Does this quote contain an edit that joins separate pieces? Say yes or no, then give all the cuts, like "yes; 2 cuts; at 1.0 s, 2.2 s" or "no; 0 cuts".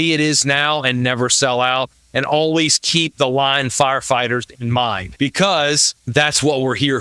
yes; 2 cuts; at 5.1 s, 5.9 s